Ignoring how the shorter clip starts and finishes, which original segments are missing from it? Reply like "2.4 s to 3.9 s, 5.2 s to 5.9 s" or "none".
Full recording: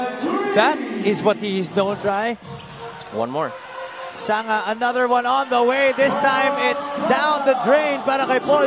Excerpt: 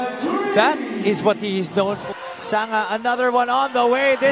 2.0 s to 3.8 s

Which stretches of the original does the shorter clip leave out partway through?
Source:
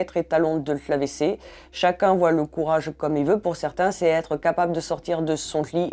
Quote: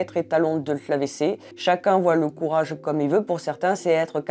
1.5 s to 1.6 s

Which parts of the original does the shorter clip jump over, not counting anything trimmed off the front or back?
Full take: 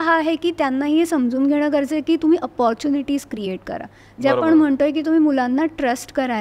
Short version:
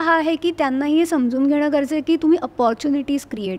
none

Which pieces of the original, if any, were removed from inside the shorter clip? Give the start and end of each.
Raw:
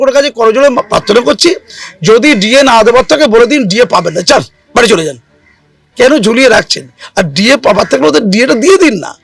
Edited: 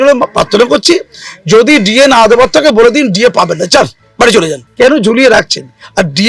5.2 s to 5.8 s

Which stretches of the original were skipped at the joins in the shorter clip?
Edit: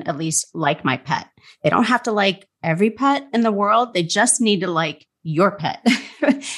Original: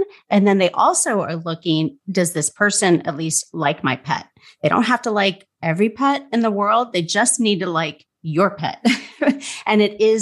none

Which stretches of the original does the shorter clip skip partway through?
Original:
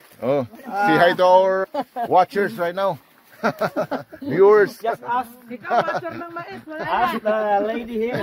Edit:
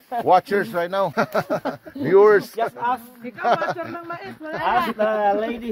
3.0 s to 3.4 s

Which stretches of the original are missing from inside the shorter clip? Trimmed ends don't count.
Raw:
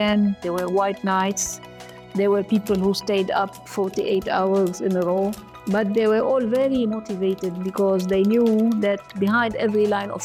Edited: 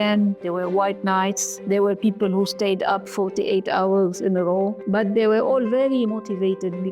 1.5 s to 2.0 s, 3.5 s to 3.7 s, 5.4 s to 5.6 s

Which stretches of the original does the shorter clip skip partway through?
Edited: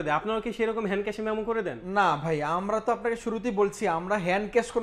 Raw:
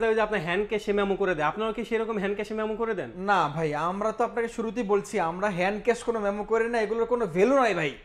none

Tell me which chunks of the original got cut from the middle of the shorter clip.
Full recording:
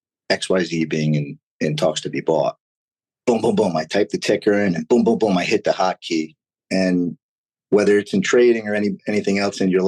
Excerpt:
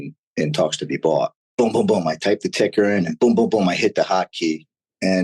2.7 s to 3.1 s

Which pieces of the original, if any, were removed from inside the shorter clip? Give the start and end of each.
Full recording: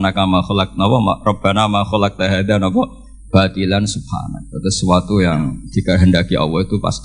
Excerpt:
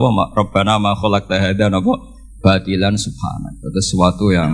none

